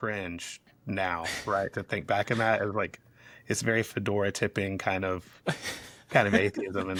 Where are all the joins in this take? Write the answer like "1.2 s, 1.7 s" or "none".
none